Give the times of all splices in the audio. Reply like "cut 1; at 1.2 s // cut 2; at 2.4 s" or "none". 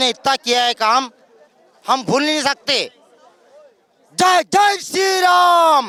none